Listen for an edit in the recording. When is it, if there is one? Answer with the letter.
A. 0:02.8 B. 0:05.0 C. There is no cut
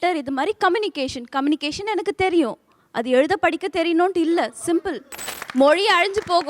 B